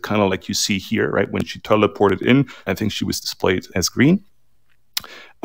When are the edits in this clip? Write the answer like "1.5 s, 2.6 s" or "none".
none

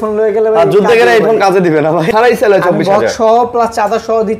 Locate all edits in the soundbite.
2.1 s

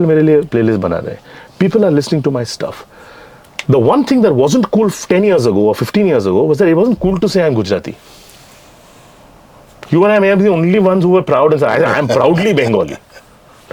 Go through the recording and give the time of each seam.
none

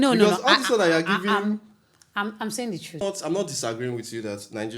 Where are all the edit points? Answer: 3.0 s

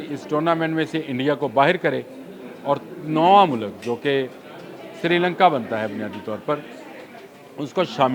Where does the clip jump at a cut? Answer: none

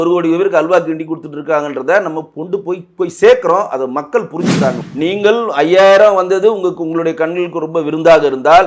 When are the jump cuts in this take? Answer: 4.8 s

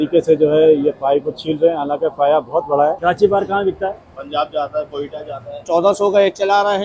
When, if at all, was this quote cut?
3.0 s, 5.6 s

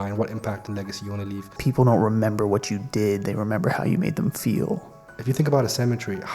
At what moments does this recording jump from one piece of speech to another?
1.5 s, 5.1 s

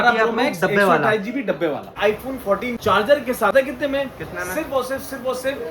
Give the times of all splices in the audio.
2.2 s, 3.5 s

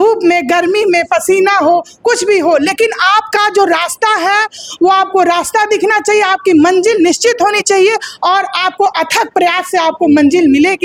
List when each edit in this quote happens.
none

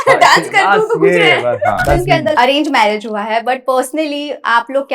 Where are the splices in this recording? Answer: 1.8 s

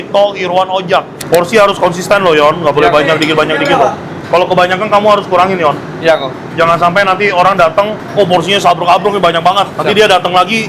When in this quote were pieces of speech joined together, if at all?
1.1 s, 4.1 s

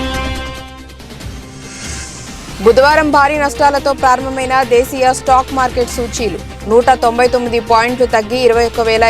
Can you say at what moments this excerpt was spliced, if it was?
none

